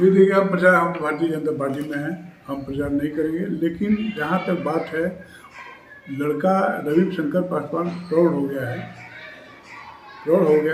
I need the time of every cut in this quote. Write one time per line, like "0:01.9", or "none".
none